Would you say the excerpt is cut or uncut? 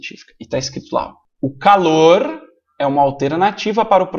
cut